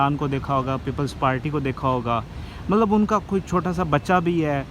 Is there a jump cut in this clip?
no; 0 cuts

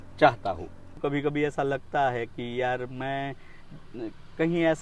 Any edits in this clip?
yes; 1 cut; at 1.0 s

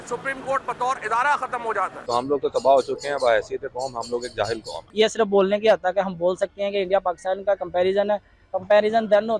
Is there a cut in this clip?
yes; 2 cuts; at 2.0 s, 4.8 s

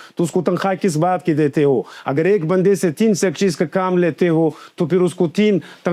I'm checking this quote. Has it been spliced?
no; 0 cuts

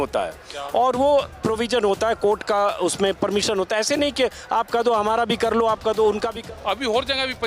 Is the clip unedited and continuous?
no; 1 cut; at 6.3 s

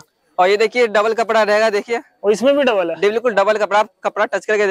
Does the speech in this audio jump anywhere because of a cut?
no; 0 cuts

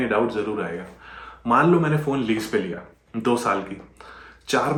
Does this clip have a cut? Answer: no; 0 cuts

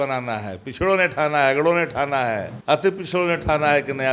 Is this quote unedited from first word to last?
no; 1 cut; at 2.5 s

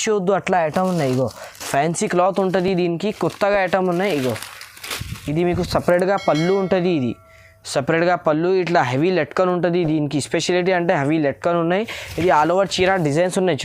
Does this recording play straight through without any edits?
yes; 0 cuts

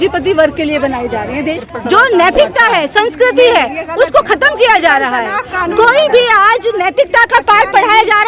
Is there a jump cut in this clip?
yes; 1 cut; at 1.6 s

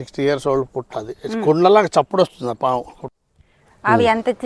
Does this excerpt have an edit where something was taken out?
yes; 1 cut; at 3.0 s

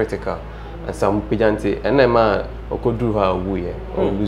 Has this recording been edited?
no; 0 cuts

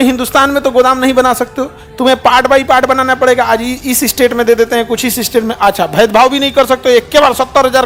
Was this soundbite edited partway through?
no; 0 cuts

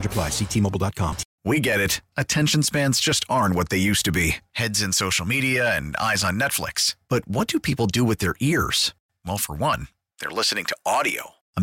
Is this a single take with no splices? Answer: no; 1 cut; at 1.3 s

